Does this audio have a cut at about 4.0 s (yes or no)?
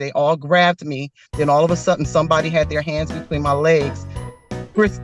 no